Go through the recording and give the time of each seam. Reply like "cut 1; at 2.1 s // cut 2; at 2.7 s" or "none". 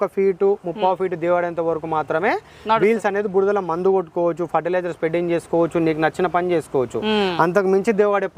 none